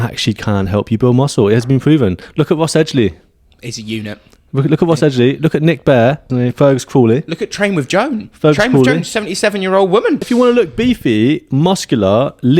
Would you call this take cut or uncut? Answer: cut